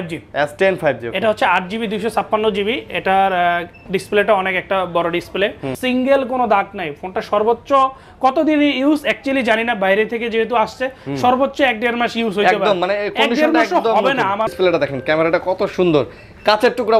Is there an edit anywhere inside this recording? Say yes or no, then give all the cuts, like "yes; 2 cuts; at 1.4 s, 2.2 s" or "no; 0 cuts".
yes; 2 cuts; at 5.7 s, 14.5 s